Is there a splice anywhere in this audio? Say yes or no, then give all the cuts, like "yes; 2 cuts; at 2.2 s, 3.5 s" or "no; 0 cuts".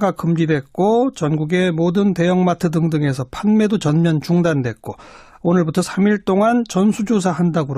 no; 0 cuts